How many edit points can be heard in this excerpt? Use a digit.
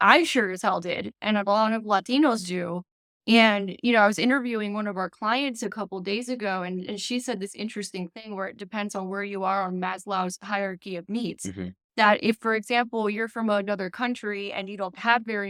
0